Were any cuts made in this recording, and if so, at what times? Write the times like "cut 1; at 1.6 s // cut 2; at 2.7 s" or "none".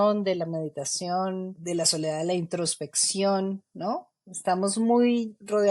cut 1; at 1.5 s